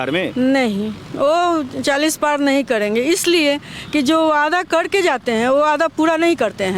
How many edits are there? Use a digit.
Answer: 0